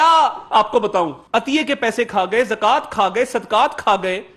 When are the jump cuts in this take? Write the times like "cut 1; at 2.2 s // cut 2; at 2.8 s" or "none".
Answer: cut 1; at 1.2 s